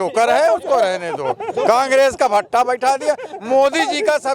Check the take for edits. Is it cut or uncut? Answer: uncut